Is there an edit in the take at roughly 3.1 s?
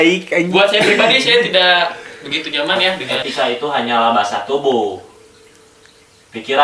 yes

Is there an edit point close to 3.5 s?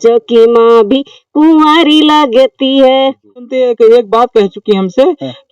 yes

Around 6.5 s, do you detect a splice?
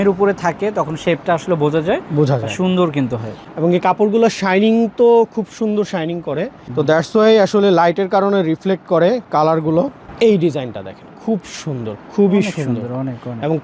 no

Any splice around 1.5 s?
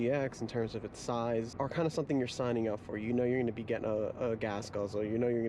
yes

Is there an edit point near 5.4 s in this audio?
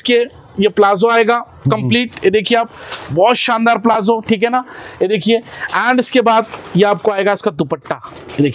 no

